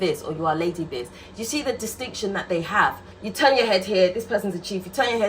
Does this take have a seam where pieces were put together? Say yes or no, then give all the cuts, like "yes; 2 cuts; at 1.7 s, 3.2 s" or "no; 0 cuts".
yes; 1 cut; at 3.1 s